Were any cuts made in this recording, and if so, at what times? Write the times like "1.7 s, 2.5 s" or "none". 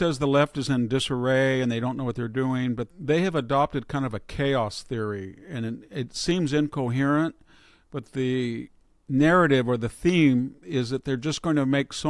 2.8 s

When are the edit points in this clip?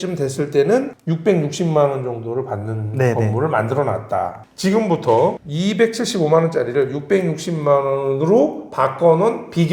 4.4 s

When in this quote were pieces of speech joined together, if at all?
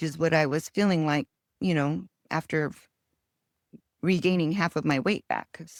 none

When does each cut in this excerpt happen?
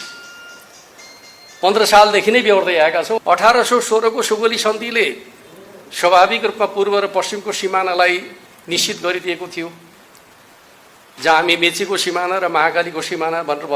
3.2 s

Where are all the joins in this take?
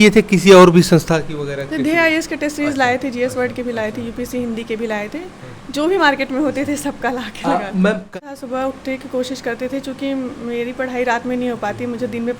8.1 s

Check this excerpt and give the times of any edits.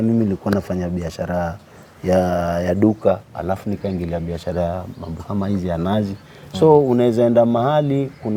none

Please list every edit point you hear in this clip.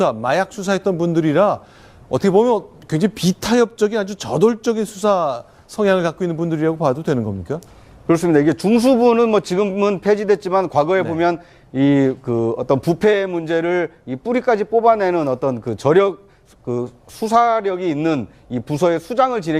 9.2 s

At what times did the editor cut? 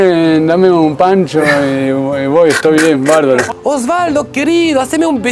3.5 s

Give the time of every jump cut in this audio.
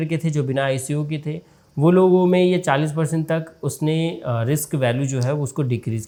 none

